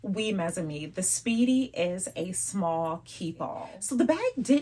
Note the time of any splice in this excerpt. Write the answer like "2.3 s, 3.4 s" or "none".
3.7 s